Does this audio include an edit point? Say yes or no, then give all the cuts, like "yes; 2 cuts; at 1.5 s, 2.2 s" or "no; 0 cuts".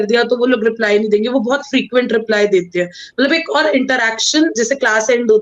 no; 0 cuts